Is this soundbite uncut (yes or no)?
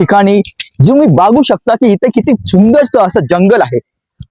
yes